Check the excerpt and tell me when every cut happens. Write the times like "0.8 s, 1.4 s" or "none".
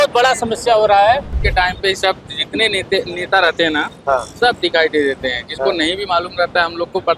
1.4 s

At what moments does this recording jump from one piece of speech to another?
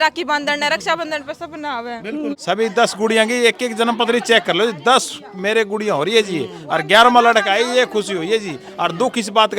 2.4 s

